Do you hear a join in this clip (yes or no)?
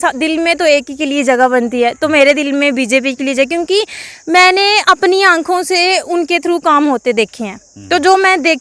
no